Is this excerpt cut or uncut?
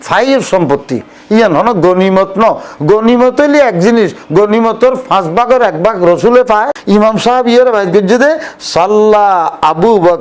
cut